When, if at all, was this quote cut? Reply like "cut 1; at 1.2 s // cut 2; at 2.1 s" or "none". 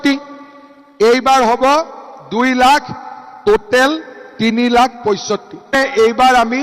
cut 1; at 5.7 s